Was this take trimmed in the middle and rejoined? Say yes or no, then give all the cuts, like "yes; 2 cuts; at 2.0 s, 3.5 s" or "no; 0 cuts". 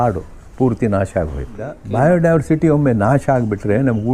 yes; 1 cut; at 1.8 s